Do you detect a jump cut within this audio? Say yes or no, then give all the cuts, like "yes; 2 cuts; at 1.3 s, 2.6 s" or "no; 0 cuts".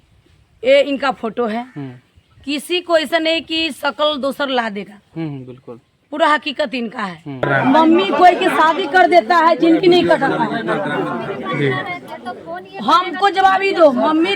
yes; 1 cut; at 7.5 s